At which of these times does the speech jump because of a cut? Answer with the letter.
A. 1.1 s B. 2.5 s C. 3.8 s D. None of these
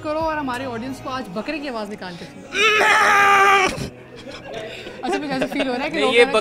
D